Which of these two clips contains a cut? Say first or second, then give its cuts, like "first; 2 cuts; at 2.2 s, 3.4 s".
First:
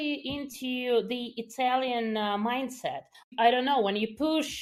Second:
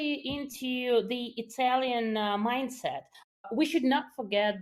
second; 1 cut; at 3.2 s